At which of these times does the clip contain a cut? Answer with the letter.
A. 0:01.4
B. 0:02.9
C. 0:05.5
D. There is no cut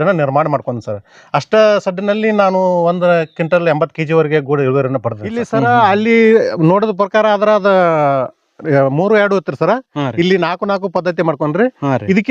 C